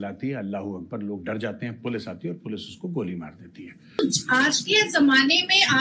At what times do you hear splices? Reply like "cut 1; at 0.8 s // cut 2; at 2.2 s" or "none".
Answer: cut 1; at 4.0 s